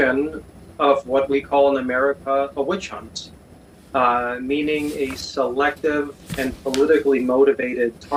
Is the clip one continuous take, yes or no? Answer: yes